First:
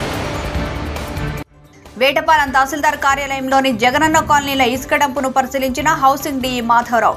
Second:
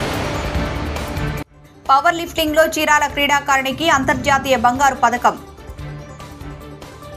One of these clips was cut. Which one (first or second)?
second